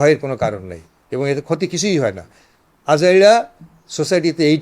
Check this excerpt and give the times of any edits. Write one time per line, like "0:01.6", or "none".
none

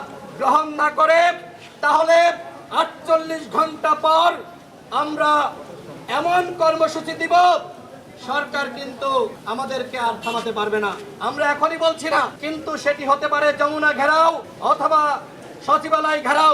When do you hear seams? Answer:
0:09.4
0:12.4
0:14.5

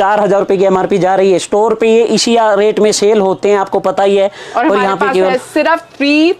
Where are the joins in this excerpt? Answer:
none

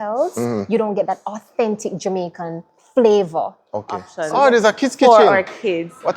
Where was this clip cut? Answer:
0:04.1

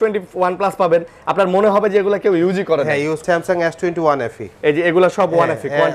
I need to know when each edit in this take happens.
0:03.2

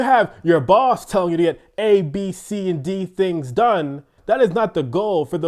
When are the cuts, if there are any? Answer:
0:04.1

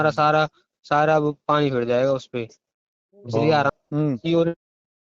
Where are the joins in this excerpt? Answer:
0:03.7

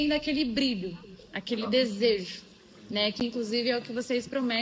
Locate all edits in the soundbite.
none

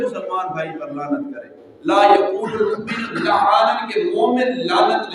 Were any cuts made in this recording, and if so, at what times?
none

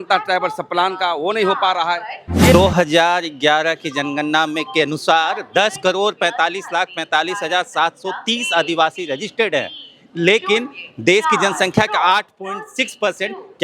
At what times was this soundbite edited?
0:02.5

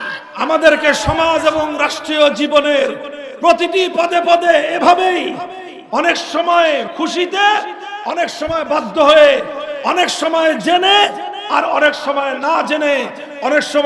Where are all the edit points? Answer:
0:06.9

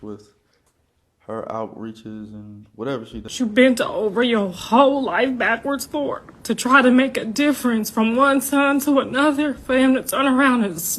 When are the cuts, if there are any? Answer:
0:03.3

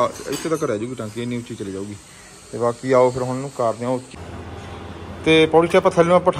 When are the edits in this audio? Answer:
0:04.1

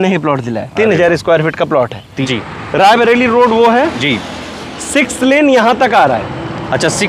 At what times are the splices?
0:02.2

